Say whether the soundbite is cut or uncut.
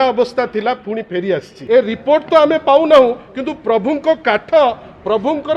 cut